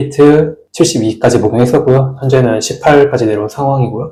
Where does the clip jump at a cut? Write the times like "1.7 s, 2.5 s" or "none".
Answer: none